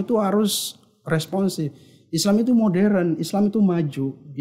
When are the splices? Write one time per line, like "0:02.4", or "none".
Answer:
none